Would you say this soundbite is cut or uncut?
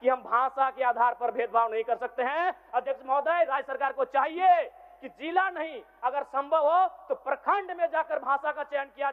uncut